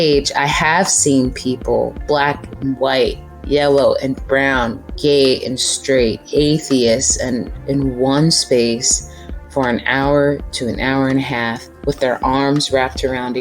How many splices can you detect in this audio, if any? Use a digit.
1